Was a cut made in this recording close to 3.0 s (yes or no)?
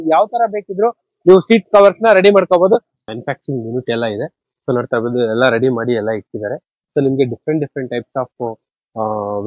yes